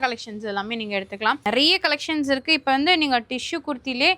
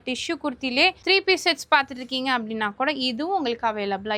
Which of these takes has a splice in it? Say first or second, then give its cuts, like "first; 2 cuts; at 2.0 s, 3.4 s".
first; 1 cut; at 1.4 s